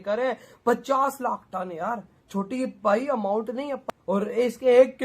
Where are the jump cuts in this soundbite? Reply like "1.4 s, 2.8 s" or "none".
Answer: 3.8 s